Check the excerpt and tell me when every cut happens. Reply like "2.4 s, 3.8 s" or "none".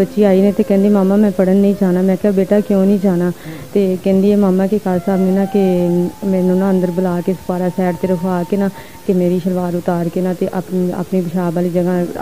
none